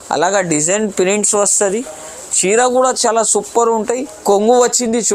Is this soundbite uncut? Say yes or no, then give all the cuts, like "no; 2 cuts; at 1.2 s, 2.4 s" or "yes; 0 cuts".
no; 1 cut; at 4.2 s